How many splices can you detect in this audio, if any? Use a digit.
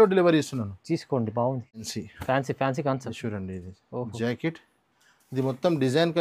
1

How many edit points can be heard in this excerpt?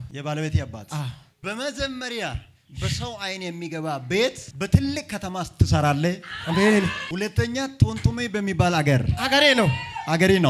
2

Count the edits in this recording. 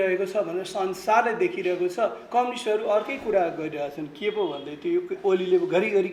0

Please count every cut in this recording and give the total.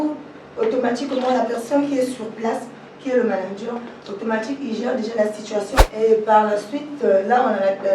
1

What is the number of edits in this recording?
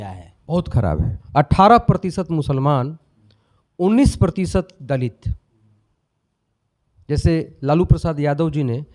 1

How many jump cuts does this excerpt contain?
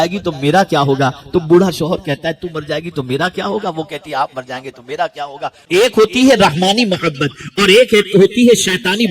1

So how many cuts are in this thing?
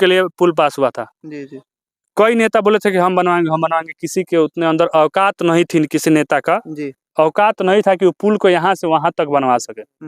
0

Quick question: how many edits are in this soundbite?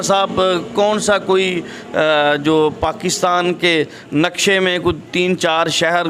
0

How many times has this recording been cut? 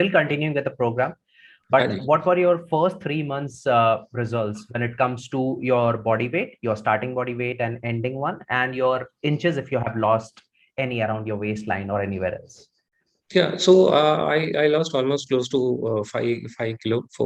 0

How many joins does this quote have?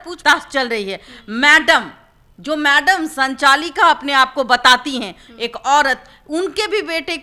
0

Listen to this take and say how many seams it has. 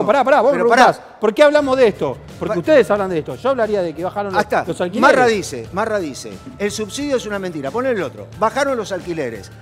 0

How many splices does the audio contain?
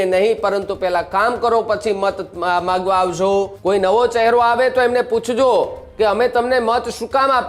1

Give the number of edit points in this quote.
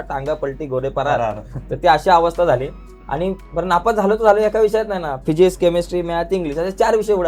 0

